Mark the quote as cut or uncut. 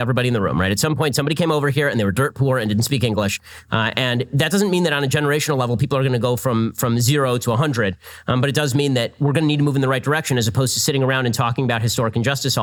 uncut